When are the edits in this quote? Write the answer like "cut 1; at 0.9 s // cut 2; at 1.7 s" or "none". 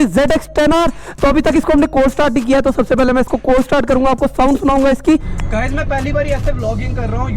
cut 1; at 5.4 s